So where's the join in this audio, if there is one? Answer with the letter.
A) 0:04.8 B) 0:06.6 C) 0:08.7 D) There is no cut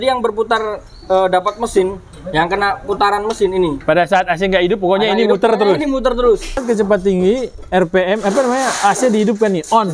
B